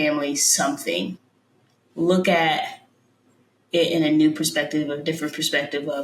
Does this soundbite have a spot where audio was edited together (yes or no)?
yes